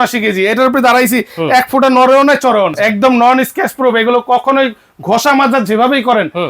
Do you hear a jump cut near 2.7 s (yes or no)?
yes